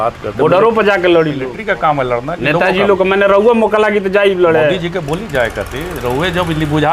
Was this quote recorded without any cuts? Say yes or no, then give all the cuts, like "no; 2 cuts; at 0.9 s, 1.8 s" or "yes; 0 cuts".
no; 1 cut; at 1.5 s